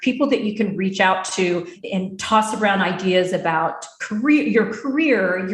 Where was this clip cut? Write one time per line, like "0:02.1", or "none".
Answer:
0:01.8